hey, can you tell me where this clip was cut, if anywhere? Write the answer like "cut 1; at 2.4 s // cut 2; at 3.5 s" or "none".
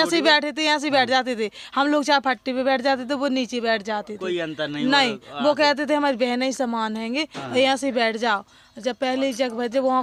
none